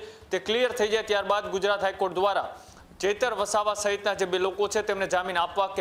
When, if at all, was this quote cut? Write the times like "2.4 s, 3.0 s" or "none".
none